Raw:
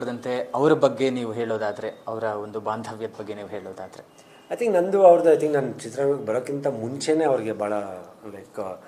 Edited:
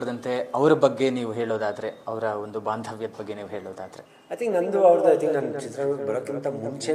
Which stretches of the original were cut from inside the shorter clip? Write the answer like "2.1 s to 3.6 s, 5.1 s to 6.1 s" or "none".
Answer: 4.1 s to 4.3 s